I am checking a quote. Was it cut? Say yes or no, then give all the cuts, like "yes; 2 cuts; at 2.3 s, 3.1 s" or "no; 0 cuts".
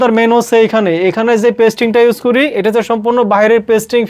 no; 0 cuts